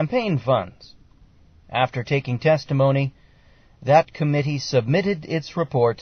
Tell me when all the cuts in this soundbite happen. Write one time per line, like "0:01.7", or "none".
0:04.9